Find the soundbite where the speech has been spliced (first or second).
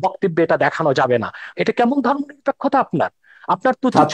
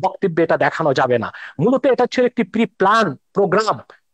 first